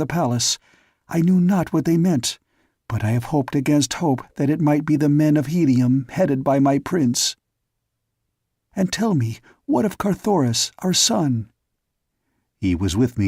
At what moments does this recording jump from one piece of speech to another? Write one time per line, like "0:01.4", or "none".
0:08.1

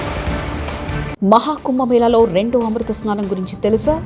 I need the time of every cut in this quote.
0:01.1

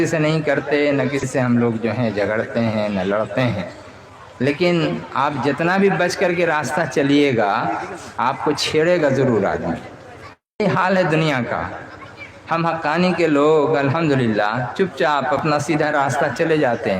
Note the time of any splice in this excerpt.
0:01.3

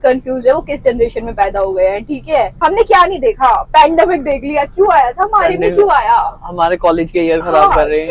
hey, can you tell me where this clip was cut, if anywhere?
0:02.5

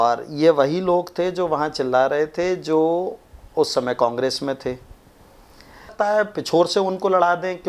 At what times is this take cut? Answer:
0:05.9

